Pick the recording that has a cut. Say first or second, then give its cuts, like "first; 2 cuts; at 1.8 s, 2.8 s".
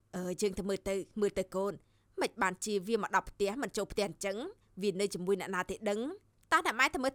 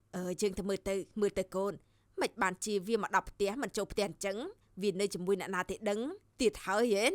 second; 1 cut; at 6.2 s